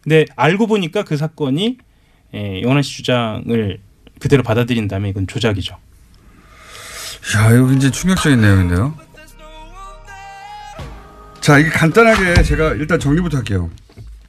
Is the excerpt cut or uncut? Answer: cut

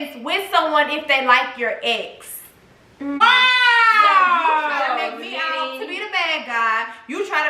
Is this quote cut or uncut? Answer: cut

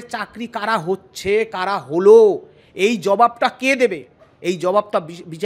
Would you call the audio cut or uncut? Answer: uncut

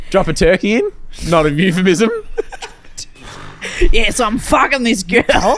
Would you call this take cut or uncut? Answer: uncut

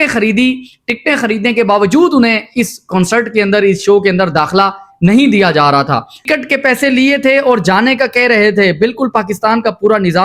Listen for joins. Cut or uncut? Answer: cut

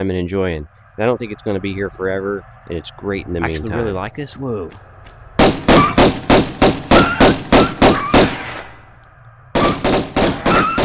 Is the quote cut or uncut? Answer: cut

